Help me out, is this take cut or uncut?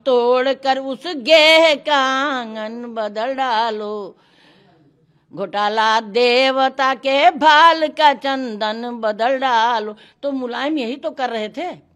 uncut